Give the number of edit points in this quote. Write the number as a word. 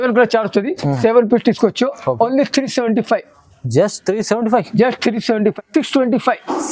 one